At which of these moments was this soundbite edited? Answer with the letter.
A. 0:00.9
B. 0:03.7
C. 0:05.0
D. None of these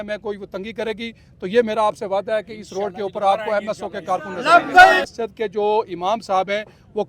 C